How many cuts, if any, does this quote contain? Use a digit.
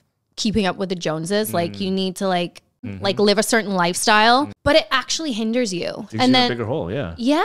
2